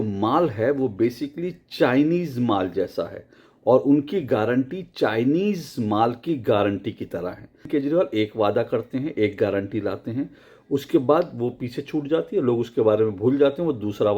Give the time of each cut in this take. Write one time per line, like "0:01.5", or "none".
0:07.7